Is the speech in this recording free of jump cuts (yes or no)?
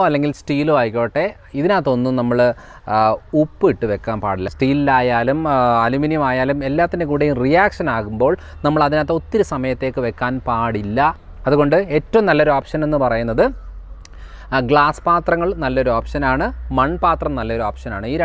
no